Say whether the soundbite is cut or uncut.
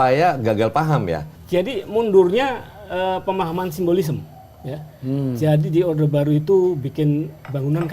cut